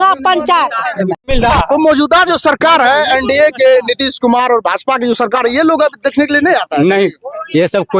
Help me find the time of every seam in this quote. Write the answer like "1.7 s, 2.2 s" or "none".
1.3 s